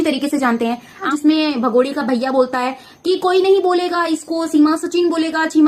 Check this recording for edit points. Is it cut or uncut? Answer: cut